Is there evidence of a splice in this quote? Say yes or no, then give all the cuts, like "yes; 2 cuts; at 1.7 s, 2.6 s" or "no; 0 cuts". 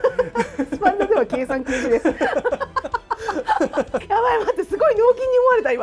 yes; 1 cut; at 4.0 s